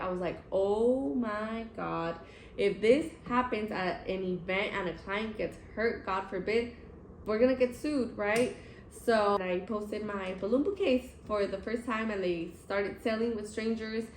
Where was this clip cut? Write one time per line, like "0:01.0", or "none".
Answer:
0:09.4